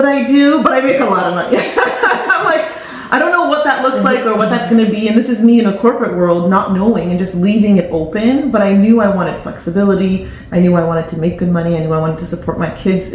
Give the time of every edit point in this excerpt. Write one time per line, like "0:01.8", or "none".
none